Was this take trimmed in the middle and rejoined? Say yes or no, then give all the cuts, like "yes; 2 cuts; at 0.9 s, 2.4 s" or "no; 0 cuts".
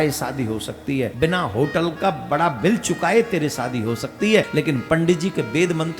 yes; 2 cuts; at 1.1 s, 4.5 s